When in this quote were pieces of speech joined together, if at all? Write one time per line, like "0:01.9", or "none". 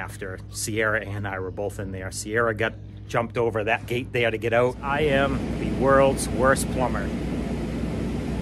0:04.8